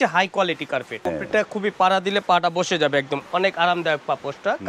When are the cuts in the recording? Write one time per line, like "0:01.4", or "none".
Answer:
0:01.1